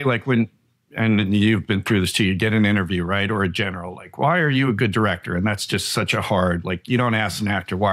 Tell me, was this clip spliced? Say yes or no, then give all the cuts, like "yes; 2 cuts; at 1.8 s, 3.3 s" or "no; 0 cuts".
no; 0 cuts